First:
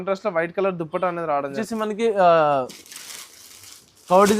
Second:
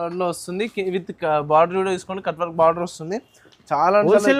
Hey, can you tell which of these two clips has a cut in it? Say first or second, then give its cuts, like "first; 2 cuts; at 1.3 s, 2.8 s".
first; 1 cut; at 1.6 s